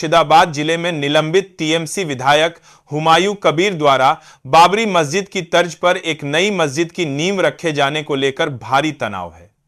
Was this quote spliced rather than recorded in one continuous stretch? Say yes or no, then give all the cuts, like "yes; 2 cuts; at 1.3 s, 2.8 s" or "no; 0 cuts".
no; 0 cuts